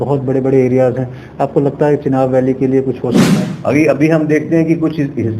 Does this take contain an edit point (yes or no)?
yes